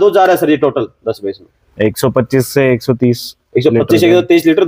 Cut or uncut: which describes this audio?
uncut